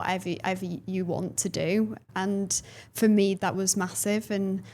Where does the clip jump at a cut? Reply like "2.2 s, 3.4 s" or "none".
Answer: 2.0 s, 3.4 s